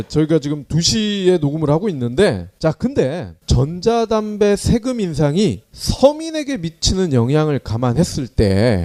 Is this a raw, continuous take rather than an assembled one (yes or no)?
yes